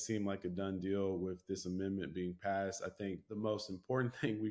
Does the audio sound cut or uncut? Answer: cut